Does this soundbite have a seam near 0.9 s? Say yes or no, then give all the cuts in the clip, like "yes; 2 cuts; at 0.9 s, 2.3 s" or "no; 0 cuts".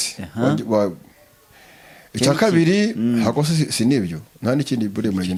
no; 0 cuts